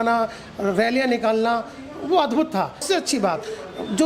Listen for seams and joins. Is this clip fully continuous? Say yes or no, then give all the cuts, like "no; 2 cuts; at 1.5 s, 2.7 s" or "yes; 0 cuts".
no; 1 cut; at 2.8 s